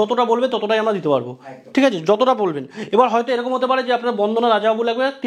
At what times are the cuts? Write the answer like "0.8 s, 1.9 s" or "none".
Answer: none

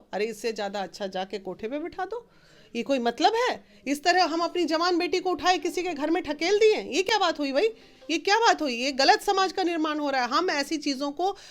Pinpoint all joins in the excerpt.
none

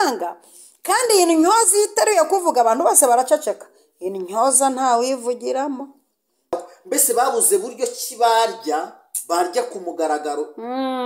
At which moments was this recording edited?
6.5 s

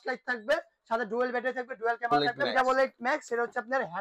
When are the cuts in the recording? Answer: 2.3 s

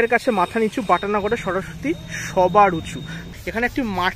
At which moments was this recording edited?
3.1 s

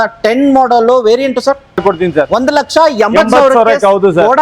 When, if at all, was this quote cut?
1.8 s

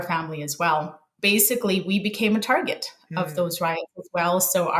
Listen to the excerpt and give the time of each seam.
1.1 s

